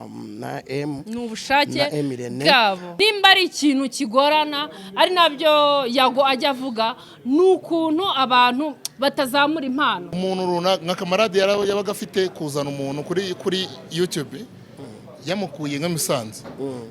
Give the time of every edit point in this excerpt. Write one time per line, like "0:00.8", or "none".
0:02.9
0:10.1